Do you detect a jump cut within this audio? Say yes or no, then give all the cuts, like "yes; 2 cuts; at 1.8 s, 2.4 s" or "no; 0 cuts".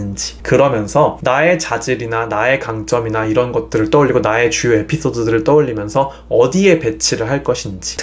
no; 0 cuts